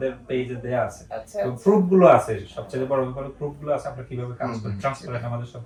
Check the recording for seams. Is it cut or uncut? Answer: uncut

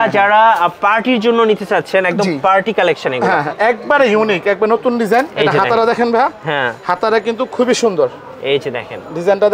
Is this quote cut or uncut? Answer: uncut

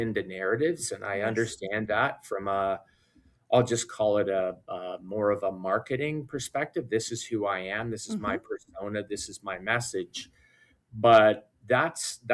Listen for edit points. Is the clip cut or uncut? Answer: uncut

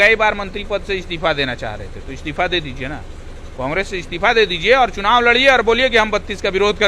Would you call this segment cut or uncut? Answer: uncut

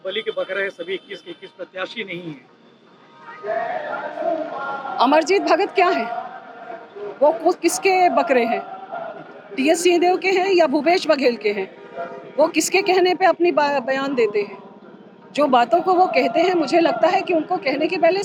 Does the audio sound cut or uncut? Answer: uncut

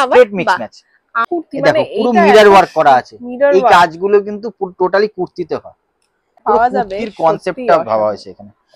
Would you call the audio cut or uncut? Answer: cut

